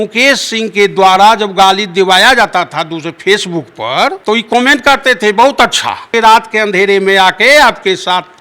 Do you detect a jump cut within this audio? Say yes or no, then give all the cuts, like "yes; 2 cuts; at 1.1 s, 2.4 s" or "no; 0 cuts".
yes; 2 cuts; at 4.2 s, 6.1 s